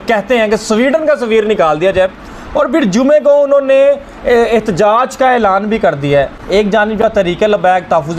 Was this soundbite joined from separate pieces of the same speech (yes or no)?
no